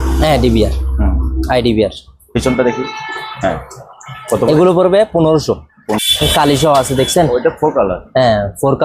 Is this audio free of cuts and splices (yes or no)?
no